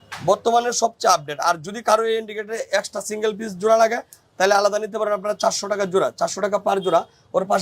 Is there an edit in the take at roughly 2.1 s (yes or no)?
no